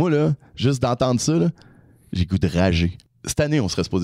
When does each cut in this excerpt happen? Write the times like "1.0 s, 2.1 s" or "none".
3.0 s